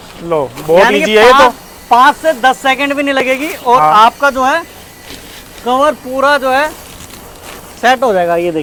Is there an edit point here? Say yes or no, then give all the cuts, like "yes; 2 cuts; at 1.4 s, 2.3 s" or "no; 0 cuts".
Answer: no; 0 cuts